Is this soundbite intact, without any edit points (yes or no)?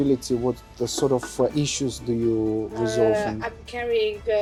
yes